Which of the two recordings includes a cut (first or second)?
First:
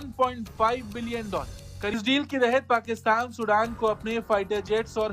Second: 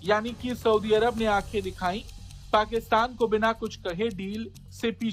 first